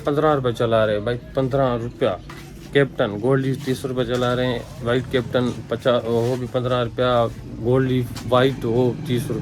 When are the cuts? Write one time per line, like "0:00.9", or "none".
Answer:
none